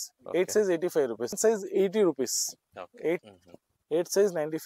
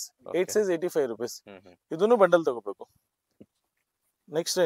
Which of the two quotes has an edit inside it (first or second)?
first